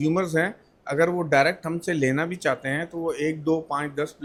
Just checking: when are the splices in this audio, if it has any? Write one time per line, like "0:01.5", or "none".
none